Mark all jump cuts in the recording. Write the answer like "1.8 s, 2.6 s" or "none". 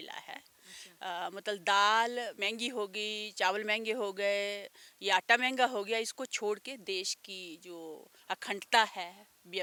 none